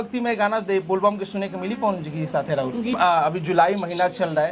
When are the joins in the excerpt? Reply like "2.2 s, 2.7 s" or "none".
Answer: 3.0 s